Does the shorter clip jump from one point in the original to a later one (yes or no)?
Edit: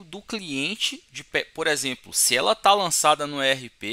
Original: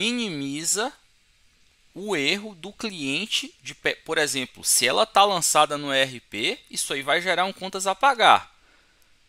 no